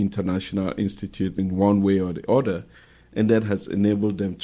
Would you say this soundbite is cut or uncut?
cut